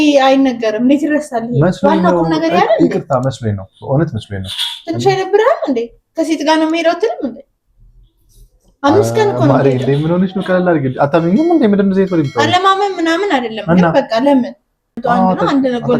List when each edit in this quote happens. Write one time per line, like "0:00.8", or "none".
0:14.9